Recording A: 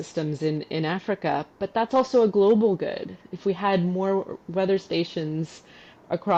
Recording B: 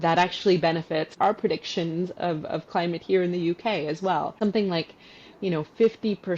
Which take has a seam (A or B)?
B